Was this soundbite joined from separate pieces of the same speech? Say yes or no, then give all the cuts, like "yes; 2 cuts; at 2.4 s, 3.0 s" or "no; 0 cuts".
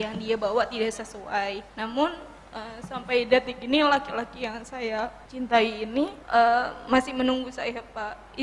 yes; 3 cuts; at 1.7 s, 5.2 s, 6.2 s